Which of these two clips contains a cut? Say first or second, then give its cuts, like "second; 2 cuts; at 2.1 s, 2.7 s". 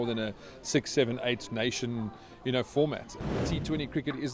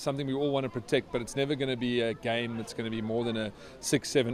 first; 1 cut; at 3.3 s